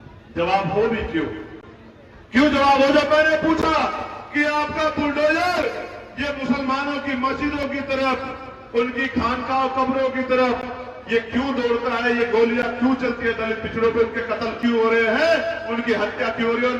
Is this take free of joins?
yes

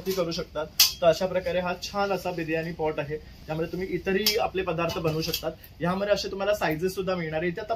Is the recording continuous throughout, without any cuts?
yes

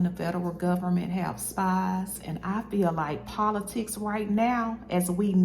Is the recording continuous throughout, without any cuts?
no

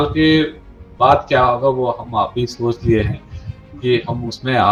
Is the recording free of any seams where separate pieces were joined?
yes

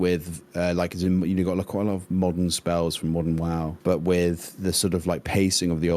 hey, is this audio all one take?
no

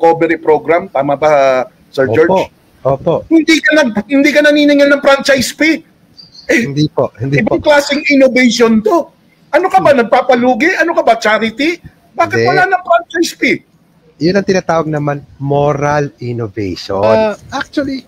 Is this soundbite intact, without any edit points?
no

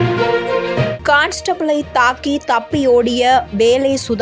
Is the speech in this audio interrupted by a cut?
no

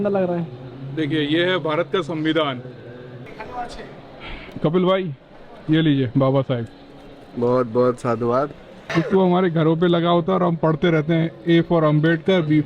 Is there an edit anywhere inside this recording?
yes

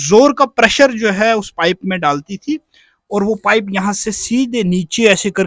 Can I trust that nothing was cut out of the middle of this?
yes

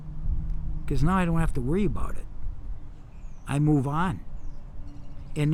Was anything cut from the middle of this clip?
no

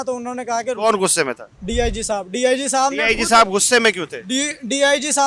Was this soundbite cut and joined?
no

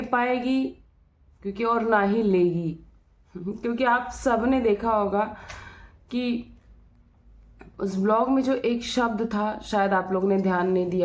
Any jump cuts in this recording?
no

